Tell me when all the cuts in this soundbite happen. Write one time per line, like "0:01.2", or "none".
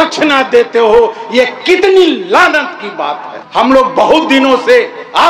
none